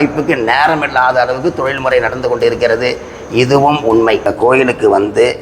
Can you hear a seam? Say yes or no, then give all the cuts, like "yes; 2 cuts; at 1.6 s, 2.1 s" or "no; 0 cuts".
yes; 1 cut; at 4.3 s